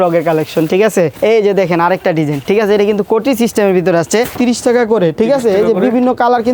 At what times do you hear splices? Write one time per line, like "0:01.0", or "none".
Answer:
0:01.1
0:02.4
0:04.4